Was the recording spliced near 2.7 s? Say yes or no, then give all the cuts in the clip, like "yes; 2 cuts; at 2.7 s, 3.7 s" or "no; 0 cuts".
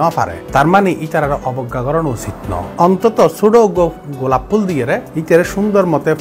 yes; 2 cuts; at 2.7 s, 5.1 s